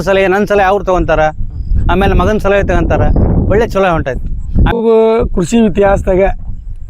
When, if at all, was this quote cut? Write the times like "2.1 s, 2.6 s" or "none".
4.7 s

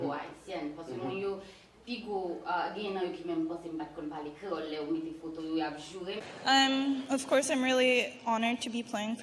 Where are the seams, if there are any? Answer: 6.2 s

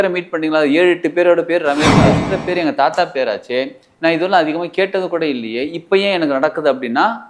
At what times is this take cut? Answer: 2.2 s

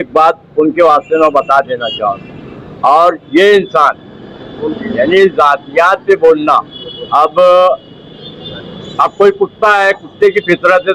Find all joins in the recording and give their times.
none

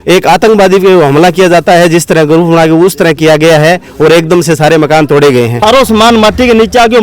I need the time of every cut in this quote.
5.6 s

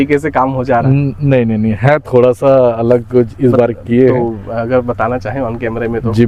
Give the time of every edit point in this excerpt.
none

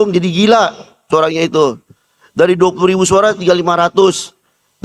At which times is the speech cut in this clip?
none

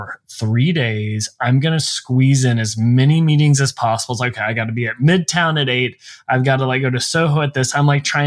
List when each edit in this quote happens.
none

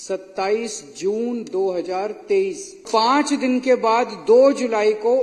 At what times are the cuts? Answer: 2.9 s

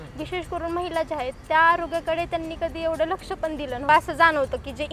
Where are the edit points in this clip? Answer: 3.9 s

